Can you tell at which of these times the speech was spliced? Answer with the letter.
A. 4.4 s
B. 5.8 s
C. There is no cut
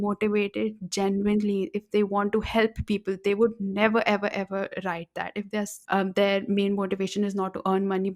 B